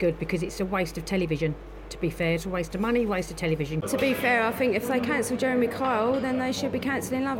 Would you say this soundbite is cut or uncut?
cut